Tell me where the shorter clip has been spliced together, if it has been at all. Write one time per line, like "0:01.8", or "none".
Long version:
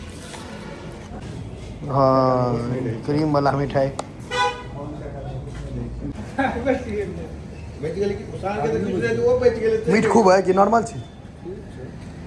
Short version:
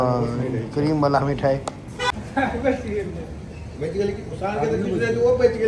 0:02.1